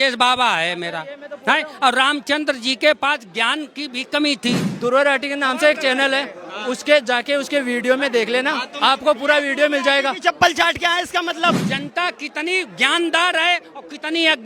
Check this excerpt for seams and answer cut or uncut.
cut